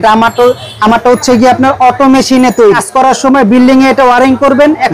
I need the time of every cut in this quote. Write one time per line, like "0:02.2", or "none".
0:02.8